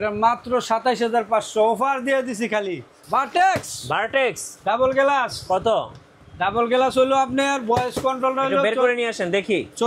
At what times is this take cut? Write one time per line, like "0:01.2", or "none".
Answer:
0:02.9

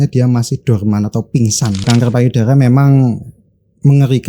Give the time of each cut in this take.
0:01.8

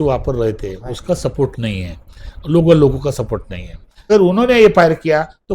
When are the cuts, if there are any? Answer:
0:03.9

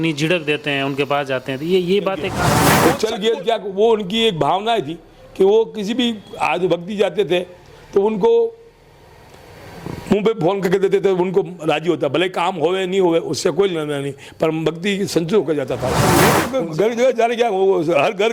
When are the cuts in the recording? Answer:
0:02.8
0:16.2

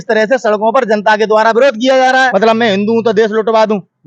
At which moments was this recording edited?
0:02.1

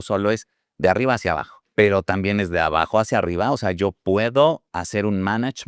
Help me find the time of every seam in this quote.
0:01.5
0:04.7

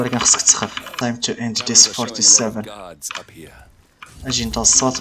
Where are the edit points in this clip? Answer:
0:00.9

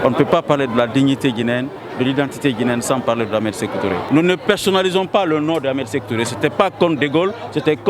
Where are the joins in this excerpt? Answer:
0:04.0

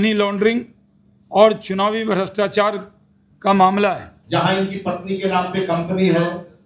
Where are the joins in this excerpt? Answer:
0:04.1

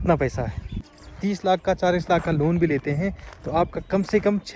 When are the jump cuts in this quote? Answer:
0:01.1

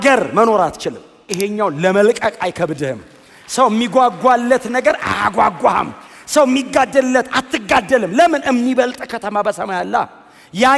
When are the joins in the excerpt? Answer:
0:01.3

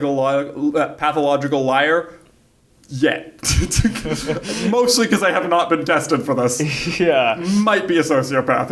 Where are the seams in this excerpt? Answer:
none

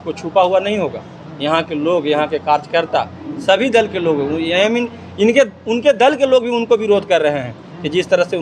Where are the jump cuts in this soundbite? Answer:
none

